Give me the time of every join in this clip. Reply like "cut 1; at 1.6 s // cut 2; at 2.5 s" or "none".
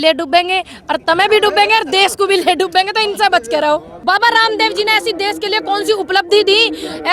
cut 1; at 3.9 s